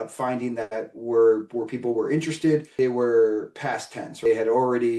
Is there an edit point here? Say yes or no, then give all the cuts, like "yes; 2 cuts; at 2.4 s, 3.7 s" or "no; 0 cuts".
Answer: yes; 2 cuts; at 2.7 s, 4.2 s